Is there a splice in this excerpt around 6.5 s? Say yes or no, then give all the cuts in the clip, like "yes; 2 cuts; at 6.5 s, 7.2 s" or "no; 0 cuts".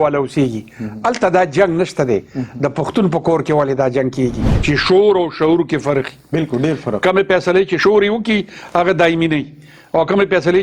no; 2 cuts; at 4.5 s, 7.8 s